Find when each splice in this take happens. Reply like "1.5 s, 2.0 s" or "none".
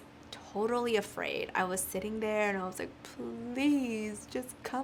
none